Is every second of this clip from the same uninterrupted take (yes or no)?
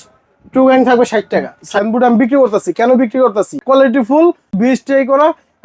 no